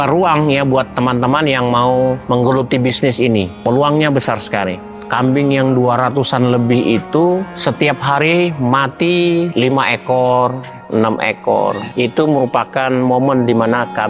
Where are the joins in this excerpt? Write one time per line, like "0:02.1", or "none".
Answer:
0:04.8
0:11.8